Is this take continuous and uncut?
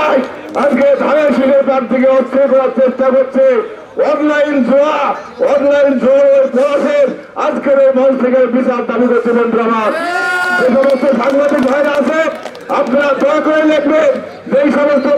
yes; 0 cuts

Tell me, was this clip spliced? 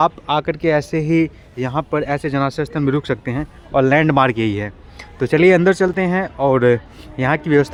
no; 0 cuts

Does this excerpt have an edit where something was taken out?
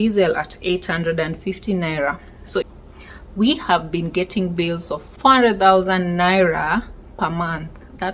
yes; 2 cuts; at 2.6 s, 5.0 s

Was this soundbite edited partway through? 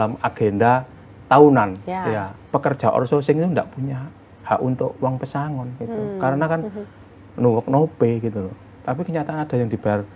yes; 2 cuts; at 2.3 s, 8.7 s

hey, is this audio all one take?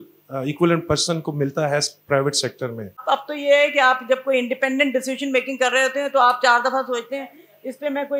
no; 1 cut; at 3.0 s

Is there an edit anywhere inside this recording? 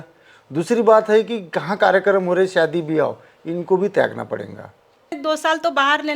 yes; 1 cut; at 5.2 s

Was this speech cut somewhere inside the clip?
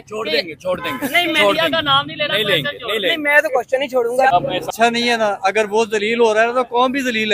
yes; 1 cut; at 4.5 s

